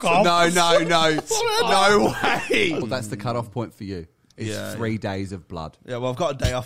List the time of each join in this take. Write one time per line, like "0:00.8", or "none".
0:02.9